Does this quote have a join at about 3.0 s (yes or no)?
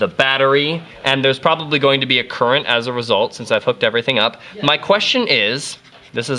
yes